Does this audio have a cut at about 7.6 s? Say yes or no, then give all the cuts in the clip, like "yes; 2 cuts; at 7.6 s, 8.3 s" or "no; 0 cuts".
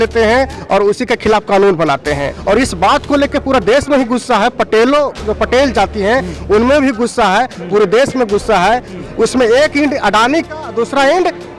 no; 2 cuts; at 2.4 s, 8.9 s